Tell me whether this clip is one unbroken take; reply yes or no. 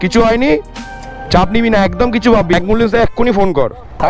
no